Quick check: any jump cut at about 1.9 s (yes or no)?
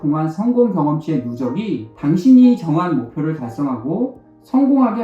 yes